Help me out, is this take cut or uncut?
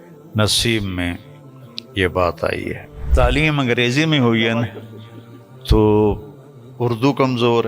cut